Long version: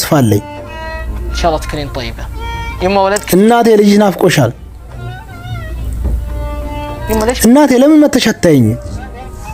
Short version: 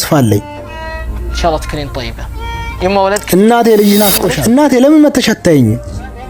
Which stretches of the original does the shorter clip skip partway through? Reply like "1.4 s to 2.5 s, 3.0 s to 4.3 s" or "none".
4.3 s to 7.3 s